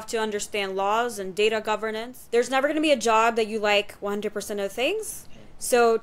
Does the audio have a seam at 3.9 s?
no; 1 cut; at 2.1 s

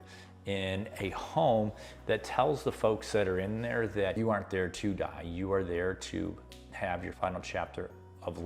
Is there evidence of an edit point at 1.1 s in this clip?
no; 2 cuts; at 4.2 s, 7.1 s

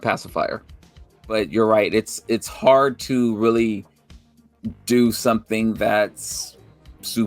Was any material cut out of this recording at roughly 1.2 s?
yes; 1 cut; at 1.2 s

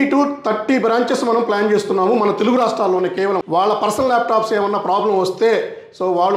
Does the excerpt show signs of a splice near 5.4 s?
no; 1 cut; at 3.4 s

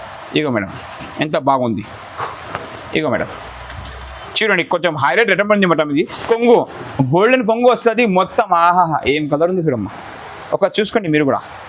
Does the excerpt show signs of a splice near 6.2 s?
yes; 1 cut; at 6.2 s

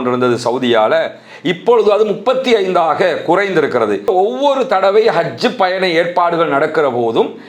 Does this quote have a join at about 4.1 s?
yes; 1 cut; at 4.1 s

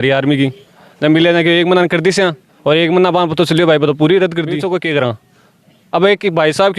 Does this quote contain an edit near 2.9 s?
no; 1 cut; at 4.6 s

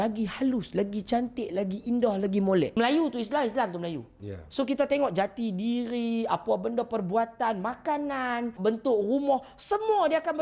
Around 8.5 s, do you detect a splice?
yes; 2 cuts; at 2.7 s, 8.5 s

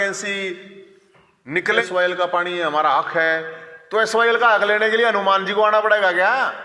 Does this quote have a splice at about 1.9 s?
yes; 1 cut; at 1.9 s

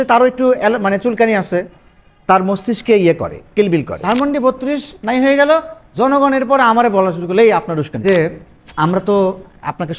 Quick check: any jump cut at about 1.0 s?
no; 2 cuts; at 3.9 s, 8.0 s

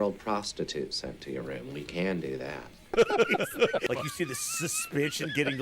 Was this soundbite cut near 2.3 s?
no; 1 cut; at 3.8 s

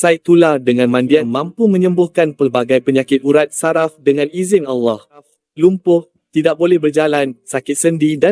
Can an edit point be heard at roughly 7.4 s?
no; 2 cuts; at 1.3 s, 5.4 s

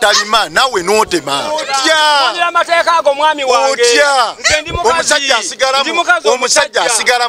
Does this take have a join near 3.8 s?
no; 1 cut; at 1.7 s

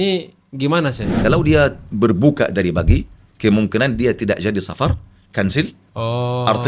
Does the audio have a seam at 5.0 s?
no; 1 cut; at 1.2 s

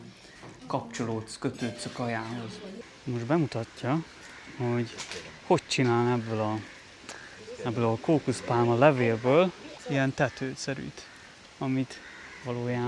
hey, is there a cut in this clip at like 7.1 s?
no; 2 cuts; at 2.7 s, 9.7 s

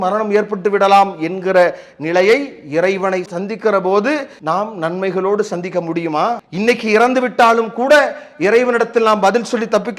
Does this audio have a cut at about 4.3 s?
yes; 2 cuts; at 4.3 s, 6.5 s

